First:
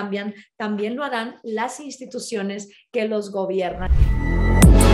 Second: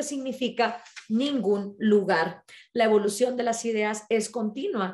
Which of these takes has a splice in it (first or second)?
first